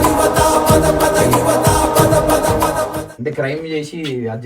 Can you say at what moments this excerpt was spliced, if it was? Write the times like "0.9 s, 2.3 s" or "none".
3.1 s